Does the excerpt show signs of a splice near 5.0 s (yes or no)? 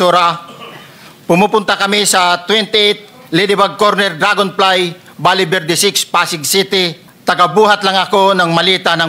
no